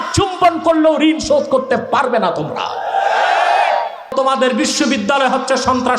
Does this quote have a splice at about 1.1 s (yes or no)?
no